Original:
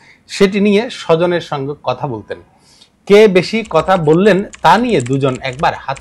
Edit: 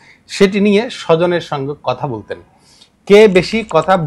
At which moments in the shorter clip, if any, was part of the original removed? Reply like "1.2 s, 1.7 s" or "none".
none